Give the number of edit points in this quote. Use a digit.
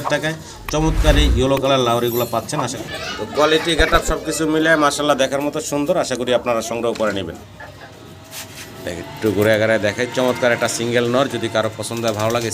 2